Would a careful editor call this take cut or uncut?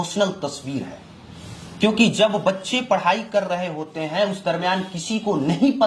uncut